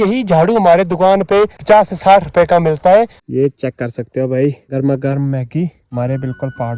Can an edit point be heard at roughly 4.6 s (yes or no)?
yes